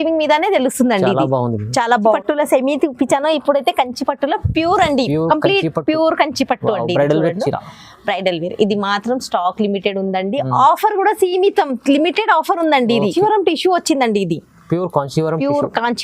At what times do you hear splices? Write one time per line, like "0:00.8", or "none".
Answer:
0:02.1
0:13.1